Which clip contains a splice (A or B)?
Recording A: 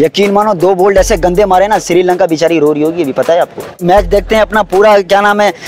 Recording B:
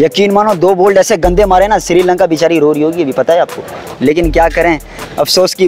A